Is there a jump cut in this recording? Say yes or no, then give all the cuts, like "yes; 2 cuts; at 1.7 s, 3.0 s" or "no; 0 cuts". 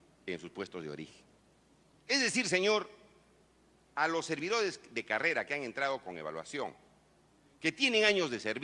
yes; 1 cut; at 5.2 s